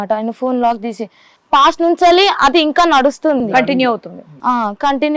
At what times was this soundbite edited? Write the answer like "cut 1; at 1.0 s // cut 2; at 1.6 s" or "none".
cut 1; at 1.4 s